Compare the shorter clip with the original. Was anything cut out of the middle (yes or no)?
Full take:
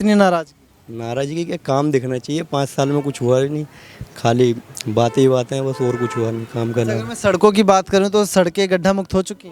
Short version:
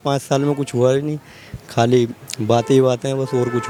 no